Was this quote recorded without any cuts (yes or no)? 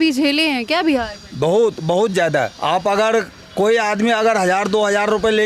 no